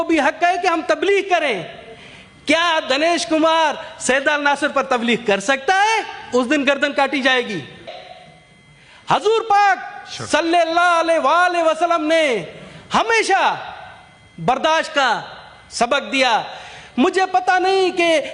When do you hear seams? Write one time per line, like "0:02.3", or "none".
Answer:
0:08.0